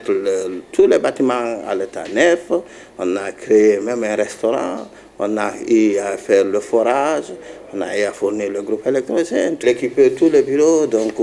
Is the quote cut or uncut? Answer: cut